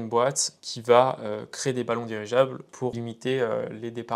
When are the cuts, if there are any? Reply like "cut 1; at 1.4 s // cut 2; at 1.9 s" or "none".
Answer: cut 1; at 3.0 s